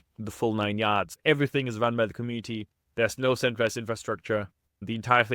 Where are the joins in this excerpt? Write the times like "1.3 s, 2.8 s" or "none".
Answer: 1.1 s